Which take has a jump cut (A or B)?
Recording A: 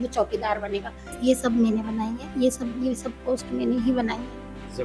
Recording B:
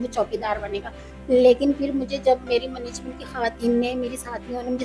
A